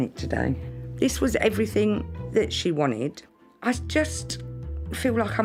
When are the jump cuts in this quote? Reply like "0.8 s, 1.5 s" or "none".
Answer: none